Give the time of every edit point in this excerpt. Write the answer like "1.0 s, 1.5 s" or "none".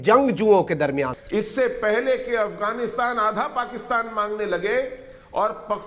1.2 s